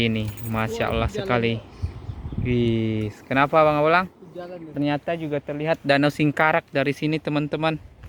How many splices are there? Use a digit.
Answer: 1